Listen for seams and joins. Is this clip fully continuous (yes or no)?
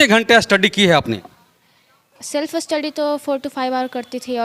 yes